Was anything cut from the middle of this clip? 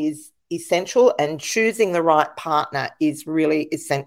no; 0 cuts

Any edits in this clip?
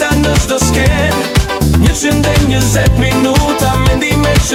no; 0 cuts

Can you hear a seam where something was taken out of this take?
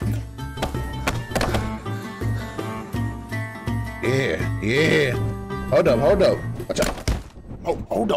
yes; 1 cut; at 3.5 s

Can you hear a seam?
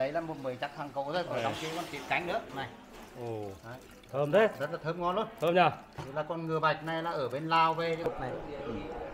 yes; 1 cut; at 8.1 s

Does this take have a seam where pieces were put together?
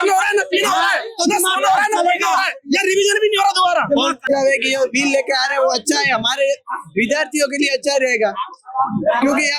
yes; 1 cut; at 4.2 s

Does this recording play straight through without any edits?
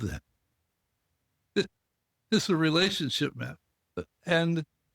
no; 1 cut; at 4.0 s

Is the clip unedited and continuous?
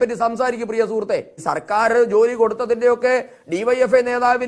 no; 1 cut; at 1.3 s

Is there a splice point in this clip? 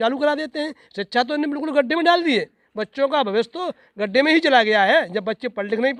no; 0 cuts

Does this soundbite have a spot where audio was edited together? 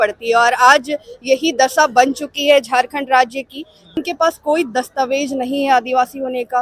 yes; 1 cut; at 3.9 s

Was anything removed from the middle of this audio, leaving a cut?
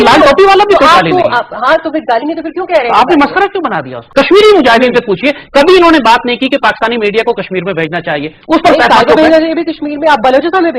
yes; 1 cut; at 4.1 s

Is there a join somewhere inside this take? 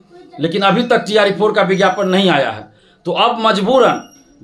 no; 0 cuts

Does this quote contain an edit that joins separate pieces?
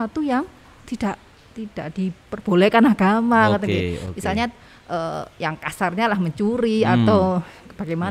no; 0 cuts

